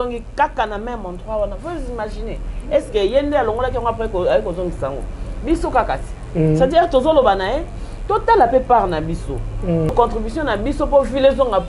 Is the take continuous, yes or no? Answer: no